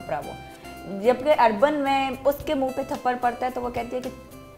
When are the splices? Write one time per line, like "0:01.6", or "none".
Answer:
0:02.2